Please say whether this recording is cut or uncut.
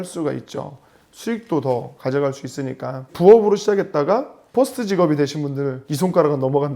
cut